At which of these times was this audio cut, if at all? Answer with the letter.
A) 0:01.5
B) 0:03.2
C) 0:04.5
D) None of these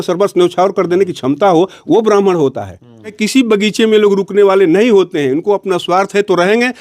B